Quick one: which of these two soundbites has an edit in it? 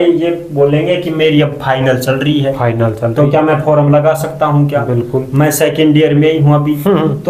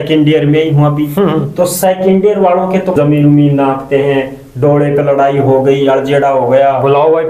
second; 1 cut; at 2.9 s

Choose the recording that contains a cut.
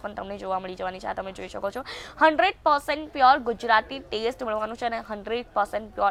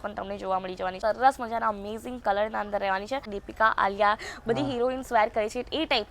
second; 2 cuts; at 1.0 s, 3.3 s

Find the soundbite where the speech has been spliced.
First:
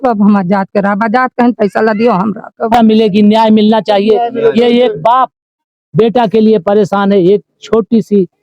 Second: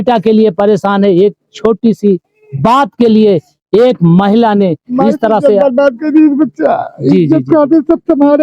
first; 1 cut; at 2.7 s

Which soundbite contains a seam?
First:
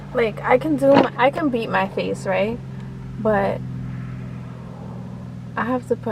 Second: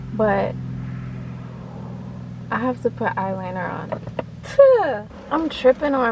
second; 1 cut; at 5.1 s

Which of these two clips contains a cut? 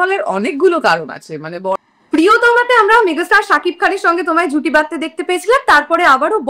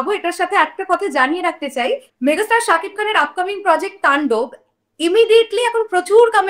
first; 1 cut; at 1.7 s

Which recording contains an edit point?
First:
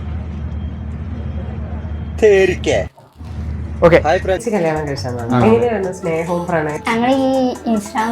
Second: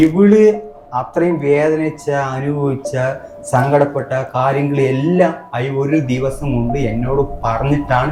first; 1 cut; at 4.4 s

